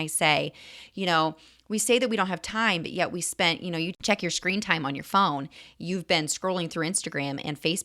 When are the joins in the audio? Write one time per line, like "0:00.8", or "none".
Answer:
0:04.0

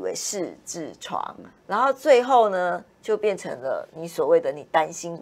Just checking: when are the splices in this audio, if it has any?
none

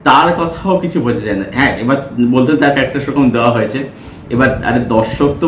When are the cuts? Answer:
none

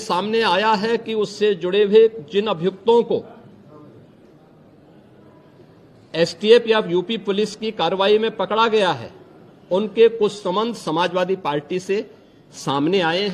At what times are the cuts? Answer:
none

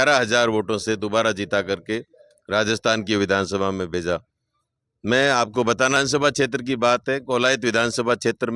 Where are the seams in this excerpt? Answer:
0:06.0

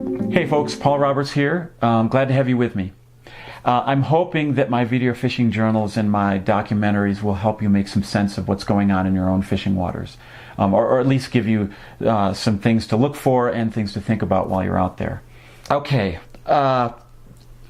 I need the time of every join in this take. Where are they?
none

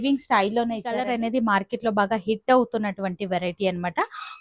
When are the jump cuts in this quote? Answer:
0:01.1

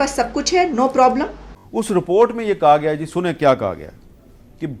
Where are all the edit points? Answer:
0:01.5

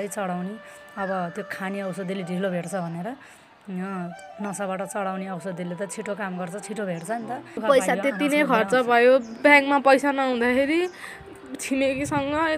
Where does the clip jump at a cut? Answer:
0:07.6

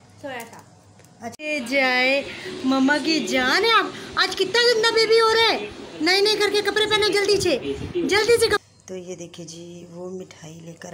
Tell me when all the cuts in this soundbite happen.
0:01.3
0:08.7

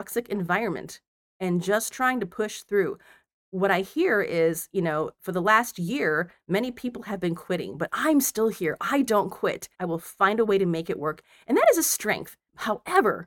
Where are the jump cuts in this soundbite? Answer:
0:09.7
0:12.4

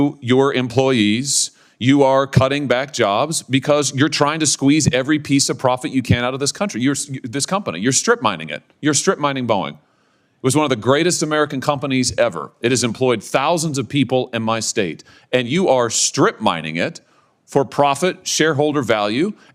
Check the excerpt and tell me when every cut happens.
none

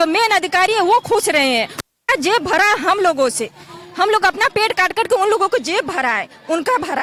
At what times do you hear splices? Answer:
none

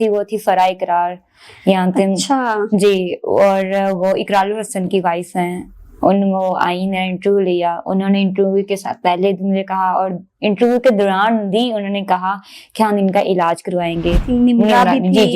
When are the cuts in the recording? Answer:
0:14.2

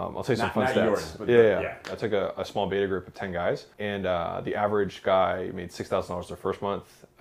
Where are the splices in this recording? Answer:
0:02.0
0:03.7

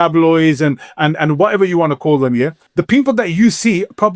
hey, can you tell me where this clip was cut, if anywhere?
0:02.6

